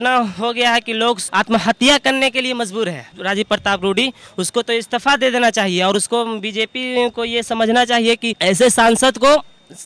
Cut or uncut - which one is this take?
cut